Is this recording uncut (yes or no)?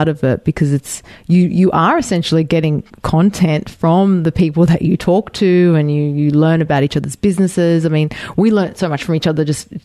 yes